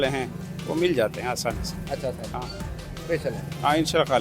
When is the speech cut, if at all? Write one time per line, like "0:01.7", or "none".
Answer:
none